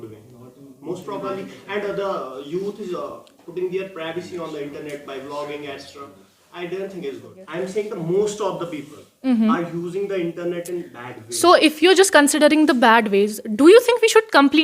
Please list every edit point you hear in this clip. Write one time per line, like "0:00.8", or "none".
0:07.4